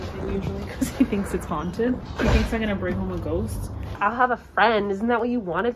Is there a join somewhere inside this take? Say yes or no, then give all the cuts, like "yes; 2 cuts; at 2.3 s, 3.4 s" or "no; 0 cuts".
yes; 2 cuts; at 2.0 s, 3.9 s